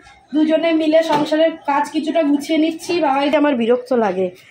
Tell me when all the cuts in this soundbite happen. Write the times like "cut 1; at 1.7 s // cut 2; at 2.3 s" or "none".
cut 1; at 3.3 s